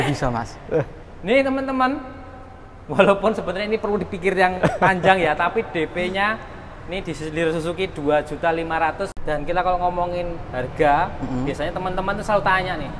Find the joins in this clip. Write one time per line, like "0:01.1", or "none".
0:09.2